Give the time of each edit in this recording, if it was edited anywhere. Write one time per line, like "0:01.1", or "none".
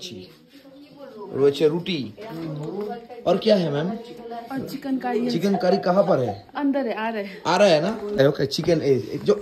0:08.2